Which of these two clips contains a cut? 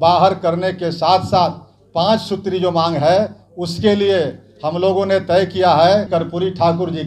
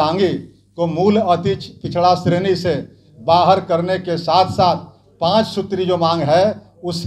first; 1 cut; at 6.1 s

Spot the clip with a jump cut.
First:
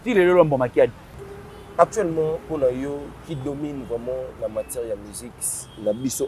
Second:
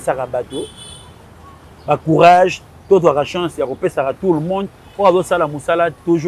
first; 1 cut; at 1.0 s

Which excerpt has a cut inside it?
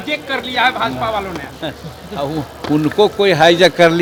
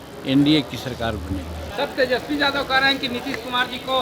second; 1 cut; at 1.6 s

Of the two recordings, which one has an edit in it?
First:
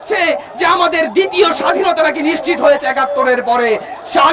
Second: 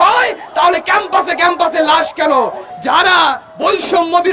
second; 1 cut; at 2.7 s

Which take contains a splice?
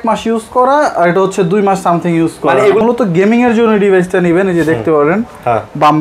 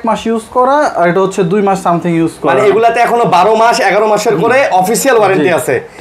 first; 1 cut; at 2.8 s

